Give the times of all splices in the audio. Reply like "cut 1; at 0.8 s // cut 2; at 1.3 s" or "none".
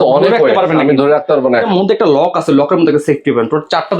cut 1; at 1.7 s

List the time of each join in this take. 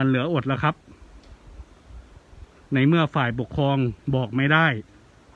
none

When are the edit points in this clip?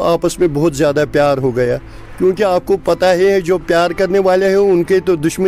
none

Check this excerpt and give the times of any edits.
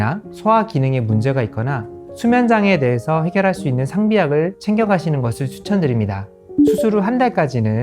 cut 1; at 6.4 s

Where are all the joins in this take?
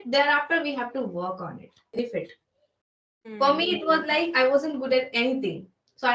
cut 1; at 1.9 s

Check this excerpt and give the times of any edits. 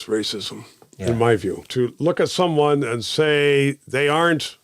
cut 1; at 1.6 s

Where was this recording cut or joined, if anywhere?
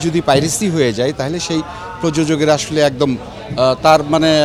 none

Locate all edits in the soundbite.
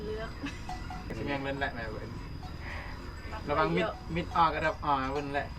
cut 1; at 1.1 s

